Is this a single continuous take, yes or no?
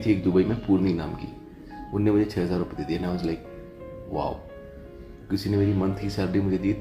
yes